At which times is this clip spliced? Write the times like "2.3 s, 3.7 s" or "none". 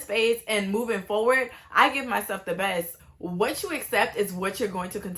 3.1 s